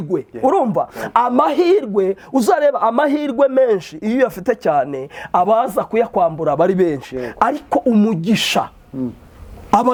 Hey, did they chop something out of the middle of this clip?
no; 0 cuts

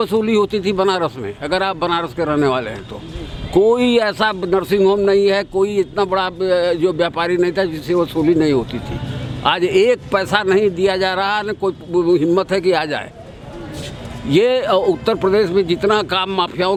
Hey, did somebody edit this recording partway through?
no; 0 cuts

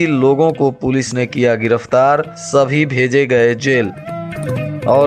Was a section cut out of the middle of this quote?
no; 0 cuts

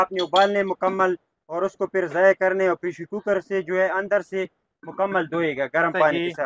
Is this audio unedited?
yes; 0 cuts

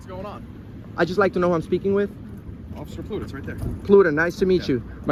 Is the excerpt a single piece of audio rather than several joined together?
yes; 0 cuts

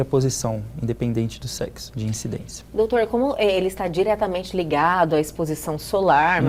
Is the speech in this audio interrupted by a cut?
no; 0 cuts

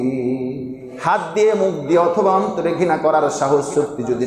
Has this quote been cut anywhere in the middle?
yes; 1 cut; at 0.9 s

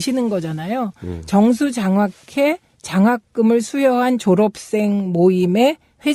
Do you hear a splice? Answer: no; 0 cuts

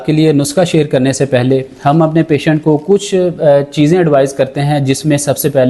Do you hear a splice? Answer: no; 0 cuts

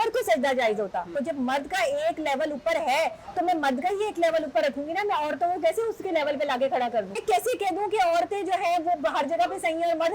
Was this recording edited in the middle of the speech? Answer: yes; 2 cuts; at 1.1 s, 7.2 s

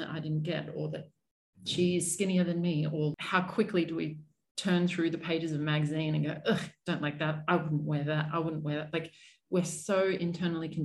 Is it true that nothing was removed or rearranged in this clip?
no; 1 cut; at 3.2 s

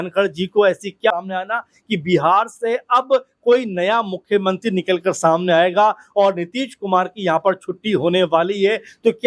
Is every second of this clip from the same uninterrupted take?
no; 1 cut; at 1.1 s

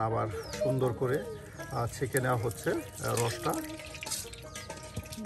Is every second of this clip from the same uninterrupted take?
yes; 0 cuts

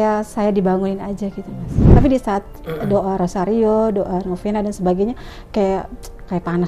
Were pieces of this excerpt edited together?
yes; 1 cut; at 1.8 s

